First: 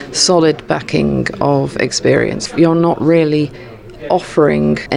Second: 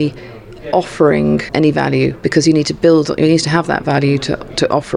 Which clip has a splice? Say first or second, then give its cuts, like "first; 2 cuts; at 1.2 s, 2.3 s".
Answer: first; 1 cut; at 2.4 s